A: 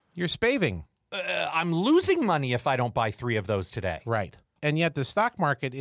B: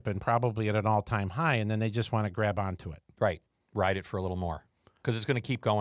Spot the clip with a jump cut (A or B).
A